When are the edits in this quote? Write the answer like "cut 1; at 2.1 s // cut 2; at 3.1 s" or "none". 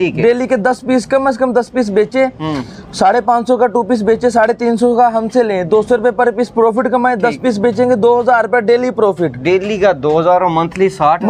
none